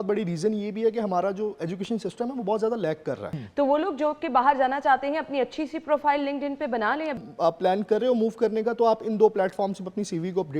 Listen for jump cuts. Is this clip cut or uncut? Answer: cut